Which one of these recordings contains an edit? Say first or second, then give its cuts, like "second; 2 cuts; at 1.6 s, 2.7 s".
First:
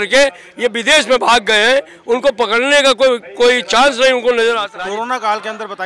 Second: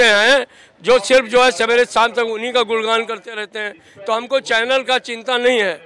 first; 1 cut; at 4.7 s